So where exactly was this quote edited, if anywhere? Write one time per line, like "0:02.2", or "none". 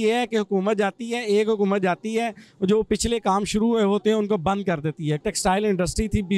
0:05.2

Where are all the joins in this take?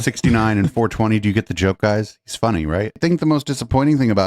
0:03.0

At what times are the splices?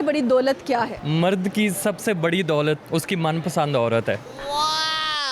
0:01.0
0:02.8

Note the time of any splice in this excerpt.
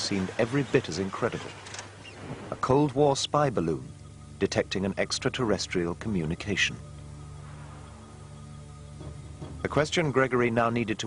0:09.1

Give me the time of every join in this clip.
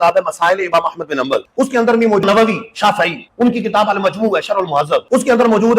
0:02.2

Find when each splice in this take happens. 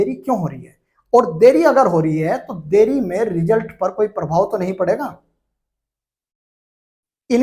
none

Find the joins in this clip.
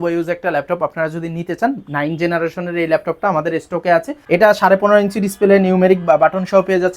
0:04.1

